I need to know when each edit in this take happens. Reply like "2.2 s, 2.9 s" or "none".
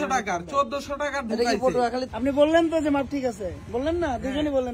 2.1 s